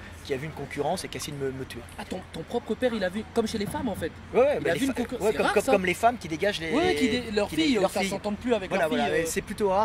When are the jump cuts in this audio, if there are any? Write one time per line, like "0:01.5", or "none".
none